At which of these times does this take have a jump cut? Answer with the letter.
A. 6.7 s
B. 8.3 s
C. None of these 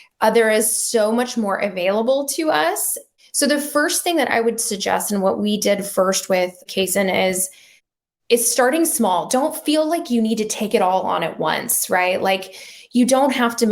A